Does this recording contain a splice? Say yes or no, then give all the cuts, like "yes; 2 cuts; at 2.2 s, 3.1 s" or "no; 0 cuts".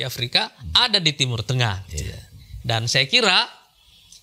no; 0 cuts